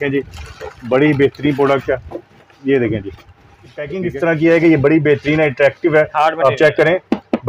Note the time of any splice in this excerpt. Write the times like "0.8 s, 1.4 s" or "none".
3.9 s